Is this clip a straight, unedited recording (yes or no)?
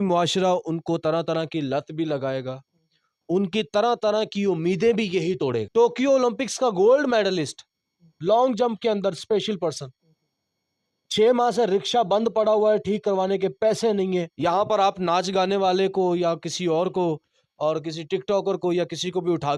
no